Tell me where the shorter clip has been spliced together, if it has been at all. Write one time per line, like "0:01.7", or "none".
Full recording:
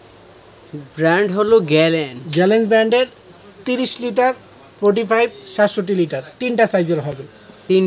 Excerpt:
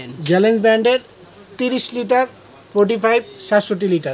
none